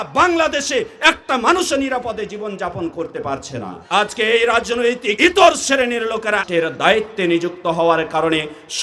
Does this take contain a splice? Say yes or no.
yes